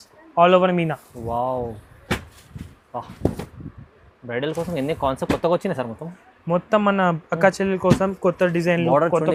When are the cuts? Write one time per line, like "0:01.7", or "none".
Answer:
none